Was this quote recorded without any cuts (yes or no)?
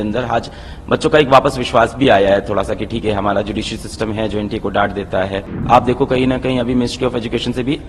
no